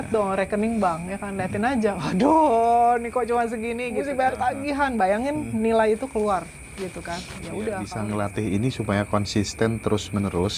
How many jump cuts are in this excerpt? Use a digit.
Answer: 2